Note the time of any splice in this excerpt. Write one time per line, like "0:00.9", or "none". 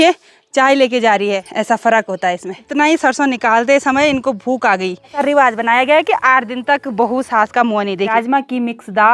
0:01.5
0:02.6
0:05.2
0:08.1